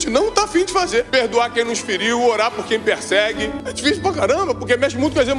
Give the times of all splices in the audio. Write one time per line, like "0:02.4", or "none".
0:01.1
0:03.6